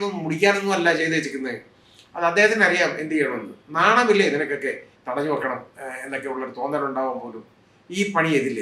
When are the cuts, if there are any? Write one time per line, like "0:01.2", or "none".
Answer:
0:04.9

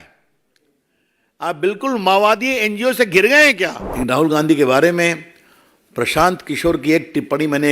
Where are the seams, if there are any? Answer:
0:03.8

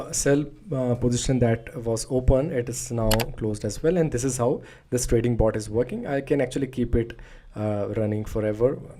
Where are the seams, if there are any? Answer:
none

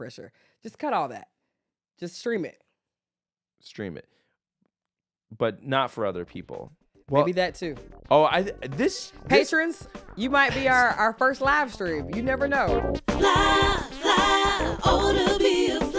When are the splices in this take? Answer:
0:12.7

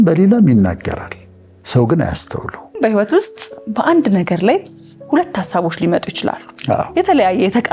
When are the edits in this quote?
0:02.8
0:06.9

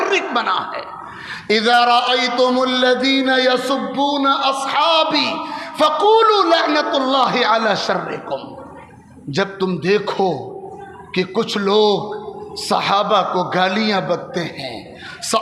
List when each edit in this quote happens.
none

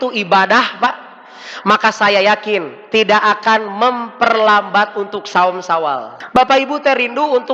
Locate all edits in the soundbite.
0:06.1

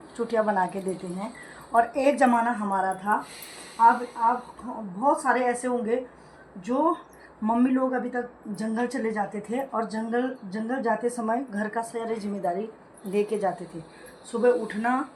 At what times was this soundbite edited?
none

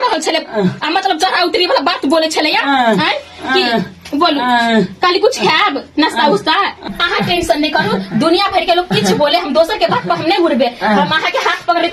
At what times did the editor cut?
none

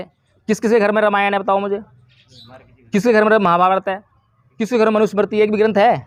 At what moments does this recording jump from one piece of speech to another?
none

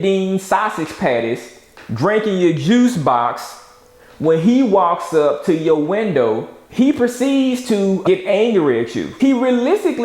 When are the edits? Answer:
0:08.0
0:09.1

